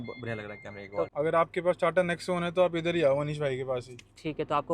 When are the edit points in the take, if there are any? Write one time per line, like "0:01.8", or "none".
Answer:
0:01.1